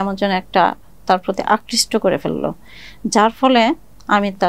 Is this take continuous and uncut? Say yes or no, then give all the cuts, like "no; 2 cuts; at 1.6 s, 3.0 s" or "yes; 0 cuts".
yes; 0 cuts